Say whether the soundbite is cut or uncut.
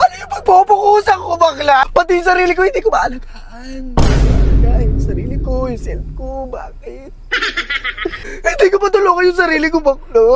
cut